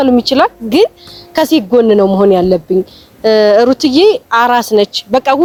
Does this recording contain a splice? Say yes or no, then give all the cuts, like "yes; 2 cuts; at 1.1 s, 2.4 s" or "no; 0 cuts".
no; 0 cuts